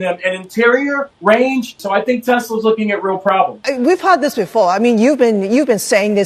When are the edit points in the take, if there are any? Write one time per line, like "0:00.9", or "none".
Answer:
0:01.8
0:03.6